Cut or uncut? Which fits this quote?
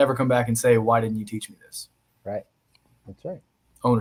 uncut